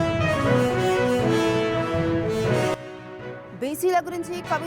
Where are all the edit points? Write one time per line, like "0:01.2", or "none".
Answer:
0:02.9